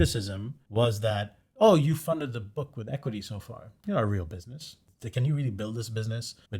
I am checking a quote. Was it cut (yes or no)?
no